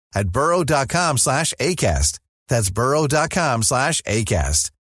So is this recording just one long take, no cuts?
yes; 0 cuts

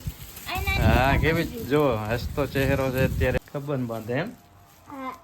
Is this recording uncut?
no; 1 cut; at 3.4 s

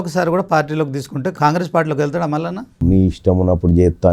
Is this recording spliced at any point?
yes; 2 cuts; at 1.3 s, 2.8 s

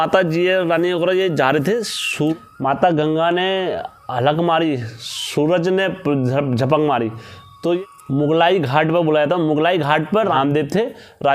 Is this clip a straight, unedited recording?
yes; 0 cuts

